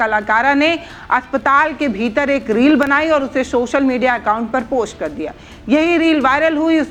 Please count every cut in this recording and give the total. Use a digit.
0